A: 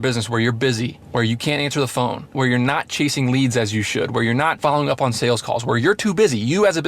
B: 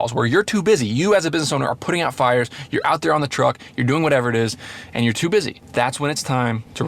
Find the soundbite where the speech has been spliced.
A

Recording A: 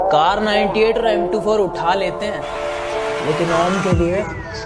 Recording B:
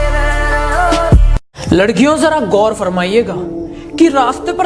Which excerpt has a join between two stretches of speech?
B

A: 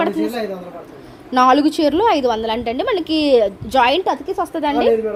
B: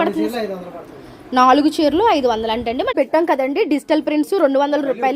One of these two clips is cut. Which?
B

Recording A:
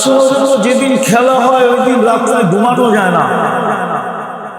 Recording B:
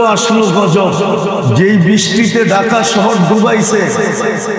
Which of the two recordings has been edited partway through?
B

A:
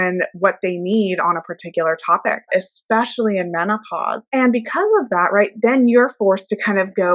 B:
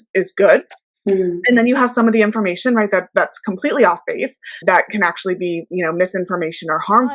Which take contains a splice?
A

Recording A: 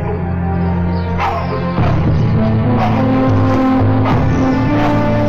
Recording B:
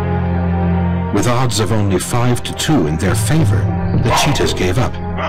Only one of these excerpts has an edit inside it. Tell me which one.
B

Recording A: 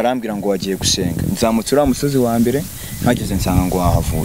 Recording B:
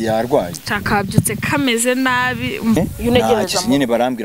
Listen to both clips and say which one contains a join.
B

